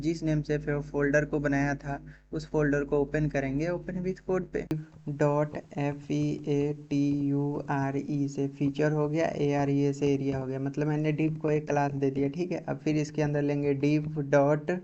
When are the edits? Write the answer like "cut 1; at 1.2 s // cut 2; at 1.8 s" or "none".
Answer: cut 1; at 4.6 s